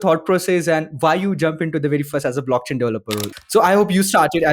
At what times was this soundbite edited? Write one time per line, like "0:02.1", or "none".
0:03.3